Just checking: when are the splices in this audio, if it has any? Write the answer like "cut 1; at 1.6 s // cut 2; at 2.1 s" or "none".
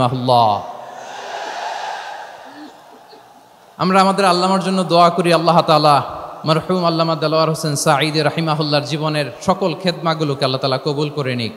none